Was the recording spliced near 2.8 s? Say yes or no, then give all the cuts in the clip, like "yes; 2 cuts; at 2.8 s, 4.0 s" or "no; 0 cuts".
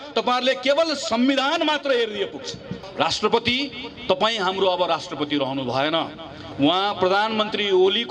yes; 1 cut; at 2.8 s